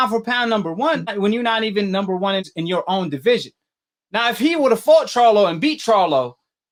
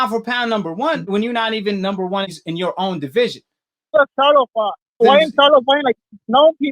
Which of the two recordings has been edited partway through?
second; 3 cuts; at 1.0 s, 3.9 s, 5.0 s

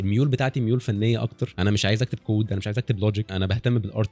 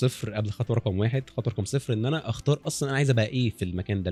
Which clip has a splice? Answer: first; 2 cuts; at 1.4 s, 3.3 s

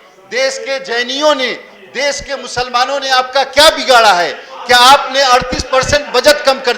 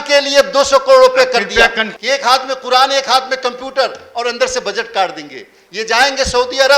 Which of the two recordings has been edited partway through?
second; 1 cut; at 1.9 s

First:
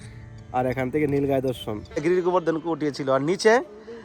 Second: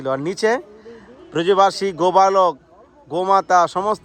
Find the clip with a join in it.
first; 1 cut; at 1.8 s

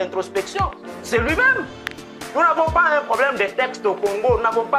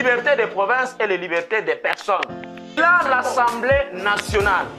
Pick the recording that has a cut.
second; 1 cut; at 2.7 s

